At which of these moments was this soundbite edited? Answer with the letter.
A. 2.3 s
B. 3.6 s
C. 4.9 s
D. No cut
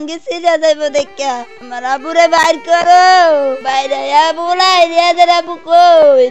B